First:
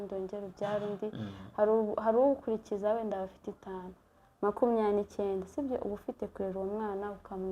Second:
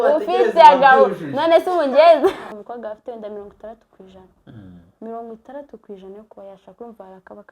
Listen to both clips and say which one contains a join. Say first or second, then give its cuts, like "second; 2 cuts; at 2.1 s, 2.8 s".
second; 1 cut; at 2.5 s